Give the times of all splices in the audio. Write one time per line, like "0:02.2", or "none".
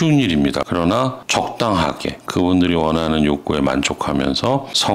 0:02.2